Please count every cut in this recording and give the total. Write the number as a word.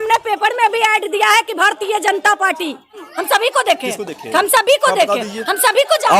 one